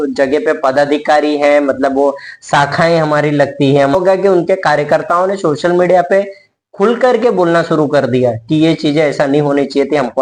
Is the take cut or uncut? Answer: cut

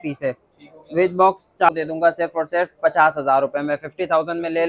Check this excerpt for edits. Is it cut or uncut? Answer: cut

